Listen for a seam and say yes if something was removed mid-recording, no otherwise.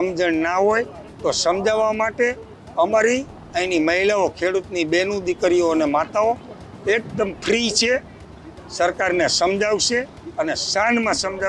no